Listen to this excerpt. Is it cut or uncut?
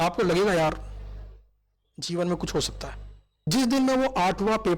cut